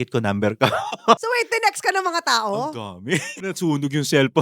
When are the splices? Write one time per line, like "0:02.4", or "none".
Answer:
0:01.2
0:03.4

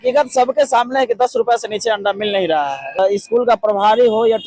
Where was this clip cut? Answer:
0:03.0

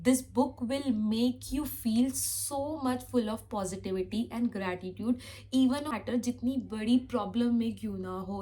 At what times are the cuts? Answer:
0:06.0

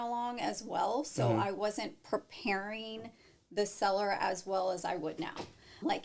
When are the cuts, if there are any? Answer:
none

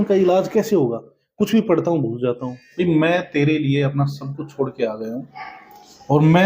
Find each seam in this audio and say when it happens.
0:02.6

